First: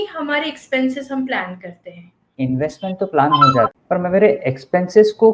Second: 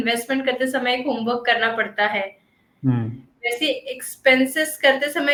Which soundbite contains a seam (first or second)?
first